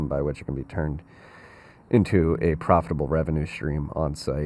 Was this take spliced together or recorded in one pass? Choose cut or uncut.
uncut